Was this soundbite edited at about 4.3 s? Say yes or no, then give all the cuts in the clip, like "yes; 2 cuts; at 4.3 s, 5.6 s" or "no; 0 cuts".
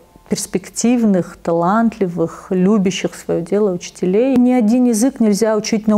yes; 1 cut; at 4.3 s